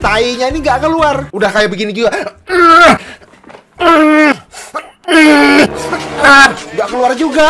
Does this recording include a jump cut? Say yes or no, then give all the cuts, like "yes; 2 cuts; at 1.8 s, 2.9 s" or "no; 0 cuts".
no; 0 cuts